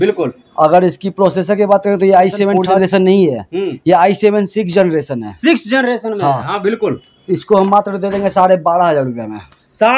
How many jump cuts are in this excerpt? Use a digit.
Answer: 1